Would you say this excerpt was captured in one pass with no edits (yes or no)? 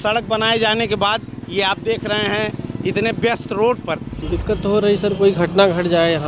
no